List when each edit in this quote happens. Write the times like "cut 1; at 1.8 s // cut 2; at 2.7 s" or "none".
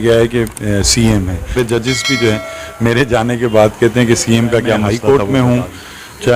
cut 1; at 1.6 s // cut 2; at 4.8 s